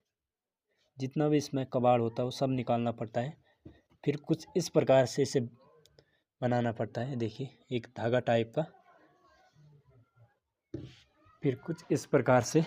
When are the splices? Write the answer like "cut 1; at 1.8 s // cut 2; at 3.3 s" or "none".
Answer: none